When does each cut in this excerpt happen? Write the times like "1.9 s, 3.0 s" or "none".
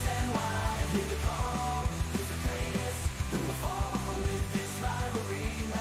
none